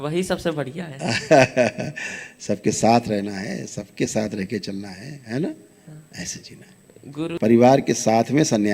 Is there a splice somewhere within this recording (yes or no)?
yes